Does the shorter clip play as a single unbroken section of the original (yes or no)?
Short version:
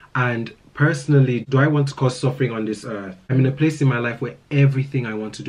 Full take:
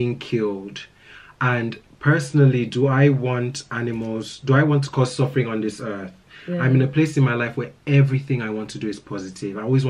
no